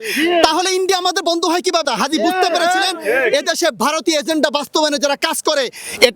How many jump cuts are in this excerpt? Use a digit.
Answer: 1